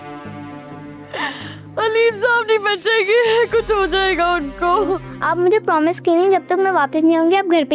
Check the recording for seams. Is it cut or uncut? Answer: cut